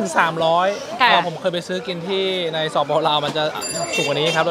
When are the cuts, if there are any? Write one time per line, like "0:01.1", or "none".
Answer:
none